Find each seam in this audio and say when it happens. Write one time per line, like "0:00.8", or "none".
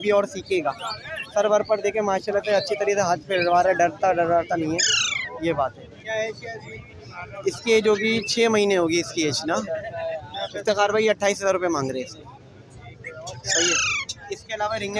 none